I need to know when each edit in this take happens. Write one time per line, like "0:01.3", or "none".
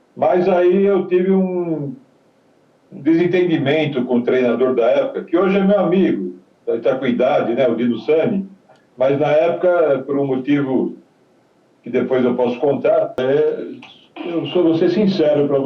0:13.2